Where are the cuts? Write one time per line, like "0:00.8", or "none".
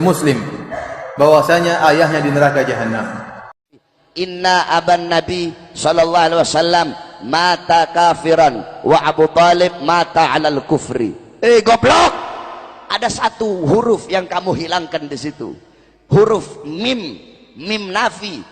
0:03.8